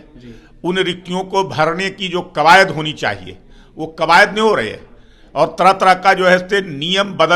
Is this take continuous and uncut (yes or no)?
yes